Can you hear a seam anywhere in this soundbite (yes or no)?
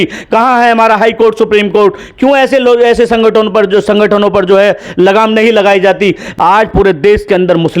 yes